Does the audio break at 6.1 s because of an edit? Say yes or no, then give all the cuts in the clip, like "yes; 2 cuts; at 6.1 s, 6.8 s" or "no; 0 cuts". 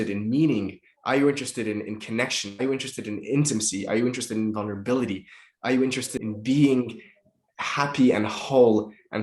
yes; 1 cut; at 6.1 s